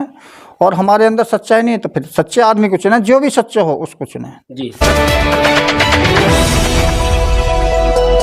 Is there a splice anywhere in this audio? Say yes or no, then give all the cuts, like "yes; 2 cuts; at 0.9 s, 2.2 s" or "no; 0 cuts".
yes; 1 cut; at 4.8 s